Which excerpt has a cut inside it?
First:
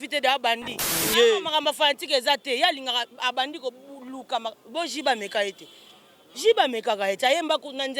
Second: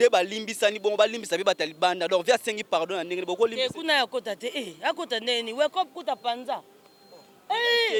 first; 1 cut; at 1.0 s

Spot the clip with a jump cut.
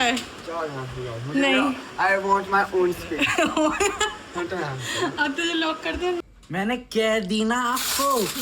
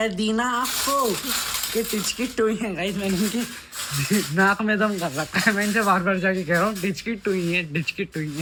first; 1 cut; at 6.2 s

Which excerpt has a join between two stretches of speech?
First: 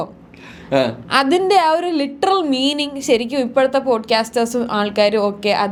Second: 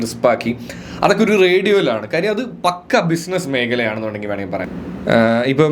second; 1 cut; at 4.7 s

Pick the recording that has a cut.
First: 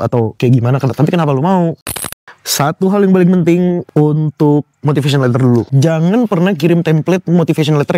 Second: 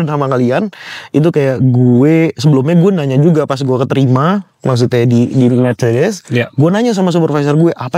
first; 3 cuts; at 2.0 s, 3.8 s, 5.7 s

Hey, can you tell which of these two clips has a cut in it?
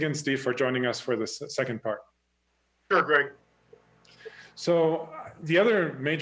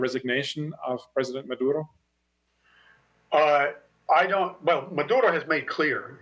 first; 1 cut; at 3.8 s

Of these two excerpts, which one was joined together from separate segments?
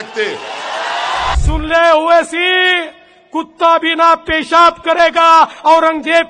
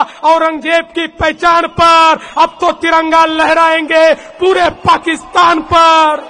first; 1 cut; at 1.4 s

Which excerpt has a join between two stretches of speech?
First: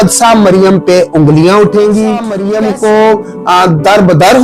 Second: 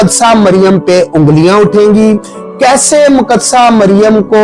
first; 1 cut; at 2.3 s

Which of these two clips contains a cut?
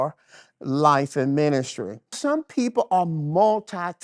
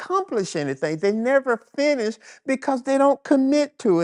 first; 1 cut; at 2.2 s

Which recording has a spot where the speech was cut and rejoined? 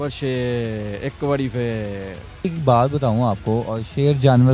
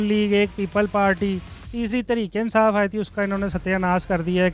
first; 1 cut; at 2.4 s

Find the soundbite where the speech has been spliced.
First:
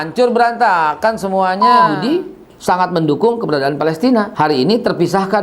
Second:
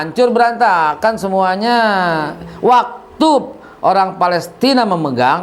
first; 2 cuts; at 1.9 s, 4.3 s

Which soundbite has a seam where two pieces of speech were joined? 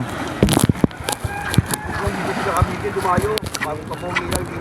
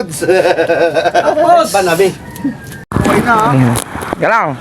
second; 1 cut; at 2.9 s

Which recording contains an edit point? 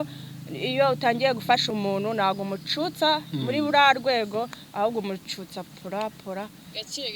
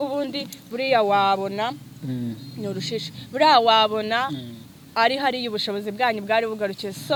first; 1 cut; at 1.7 s

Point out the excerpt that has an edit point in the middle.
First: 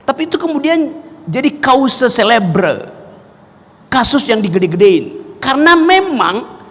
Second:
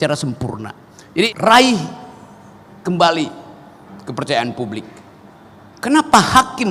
second; 1 cut; at 1.3 s

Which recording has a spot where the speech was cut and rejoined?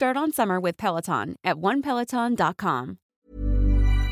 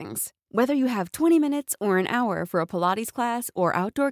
first; 1 cut; at 3.0 s

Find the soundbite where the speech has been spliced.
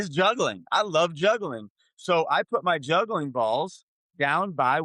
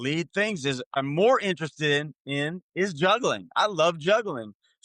second; 1 cut; at 1.0 s

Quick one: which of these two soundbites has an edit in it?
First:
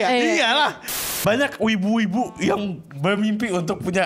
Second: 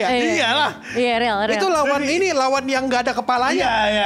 first; 1 cut; at 0.9 s

